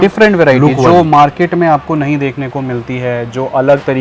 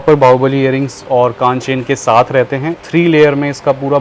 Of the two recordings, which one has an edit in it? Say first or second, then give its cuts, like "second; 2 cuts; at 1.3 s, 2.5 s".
second; 1 cut; at 2.8 s